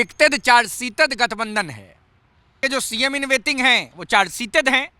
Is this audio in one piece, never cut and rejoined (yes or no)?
no